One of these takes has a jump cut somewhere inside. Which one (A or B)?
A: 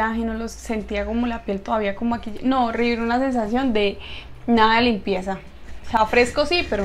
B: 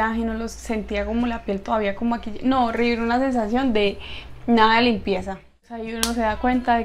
B